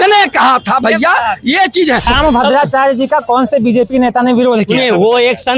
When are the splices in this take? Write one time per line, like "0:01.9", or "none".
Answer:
0:02.1